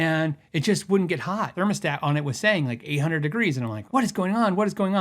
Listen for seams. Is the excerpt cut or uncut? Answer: cut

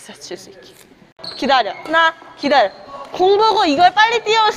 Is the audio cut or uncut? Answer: cut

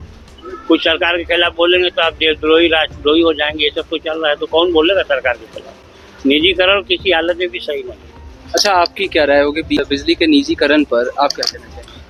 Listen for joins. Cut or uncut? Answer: uncut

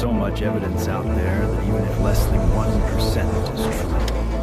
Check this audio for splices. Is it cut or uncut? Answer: uncut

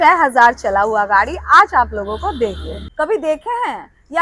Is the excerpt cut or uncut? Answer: cut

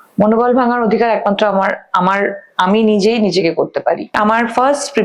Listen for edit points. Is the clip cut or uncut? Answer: cut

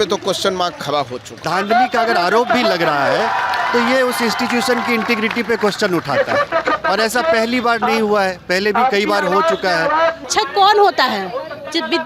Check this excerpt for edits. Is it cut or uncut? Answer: cut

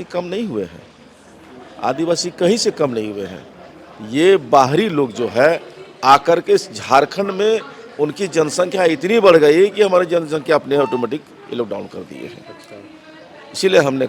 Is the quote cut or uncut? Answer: uncut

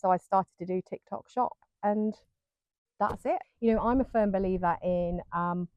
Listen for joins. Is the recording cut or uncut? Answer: cut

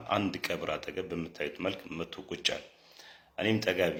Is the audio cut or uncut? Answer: uncut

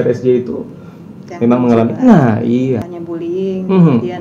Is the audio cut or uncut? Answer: cut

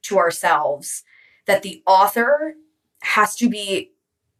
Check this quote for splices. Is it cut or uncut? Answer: uncut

